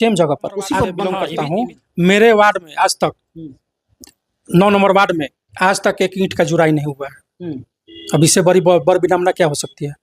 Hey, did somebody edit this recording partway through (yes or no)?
yes